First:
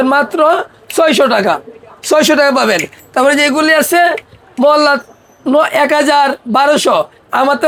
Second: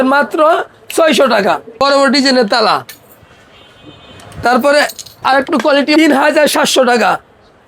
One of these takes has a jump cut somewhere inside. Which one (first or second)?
second